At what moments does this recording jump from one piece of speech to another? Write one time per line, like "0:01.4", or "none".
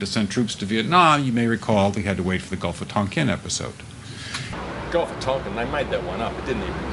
none